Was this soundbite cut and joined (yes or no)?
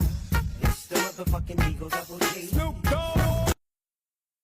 yes